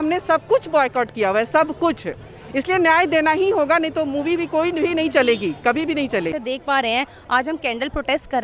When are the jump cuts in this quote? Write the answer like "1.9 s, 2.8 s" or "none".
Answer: 6.3 s